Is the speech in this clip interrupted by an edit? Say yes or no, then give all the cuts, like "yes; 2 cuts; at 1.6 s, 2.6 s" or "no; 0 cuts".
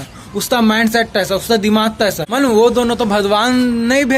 yes; 1 cut; at 2.2 s